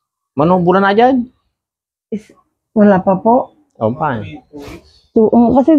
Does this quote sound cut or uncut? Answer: uncut